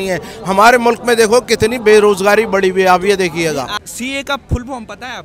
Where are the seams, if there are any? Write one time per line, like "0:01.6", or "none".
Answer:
0:03.7